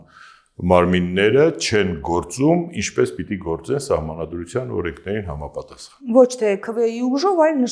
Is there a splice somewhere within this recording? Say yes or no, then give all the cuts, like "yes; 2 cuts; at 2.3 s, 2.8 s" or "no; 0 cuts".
no; 0 cuts